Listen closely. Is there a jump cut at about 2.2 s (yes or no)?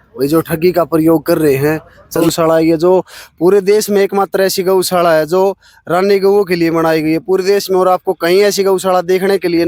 yes